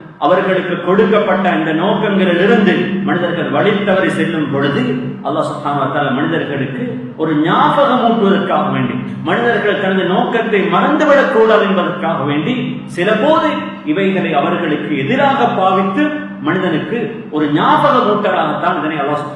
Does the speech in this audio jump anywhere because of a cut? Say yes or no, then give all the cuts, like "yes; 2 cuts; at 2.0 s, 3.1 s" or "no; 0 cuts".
no; 0 cuts